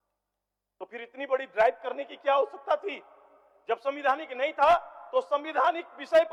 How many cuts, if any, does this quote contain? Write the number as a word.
zero